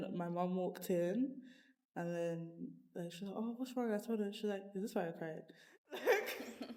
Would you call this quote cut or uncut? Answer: uncut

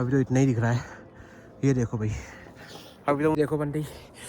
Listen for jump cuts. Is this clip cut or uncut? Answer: cut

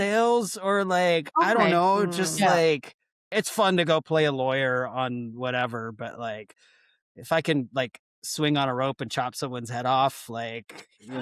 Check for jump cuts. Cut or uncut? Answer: cut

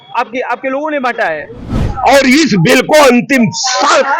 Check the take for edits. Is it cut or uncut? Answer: cut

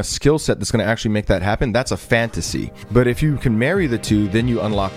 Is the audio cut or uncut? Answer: cut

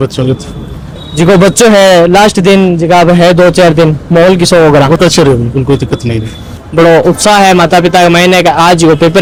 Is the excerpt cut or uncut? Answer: uncut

